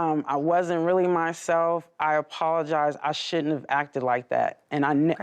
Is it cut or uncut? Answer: uncut